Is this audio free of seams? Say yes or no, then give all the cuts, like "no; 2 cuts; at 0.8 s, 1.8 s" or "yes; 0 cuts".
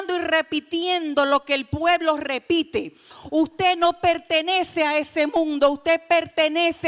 no; 1 cut; at 3.1 s